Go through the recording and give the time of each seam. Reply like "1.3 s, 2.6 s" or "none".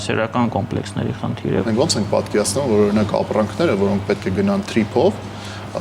1.6 s